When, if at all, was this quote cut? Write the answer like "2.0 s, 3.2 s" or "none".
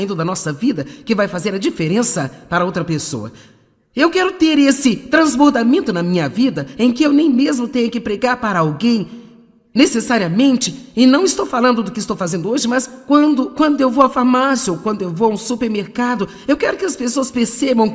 12.6 s